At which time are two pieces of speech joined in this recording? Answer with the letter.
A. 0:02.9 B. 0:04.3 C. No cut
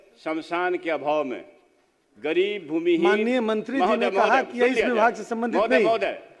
C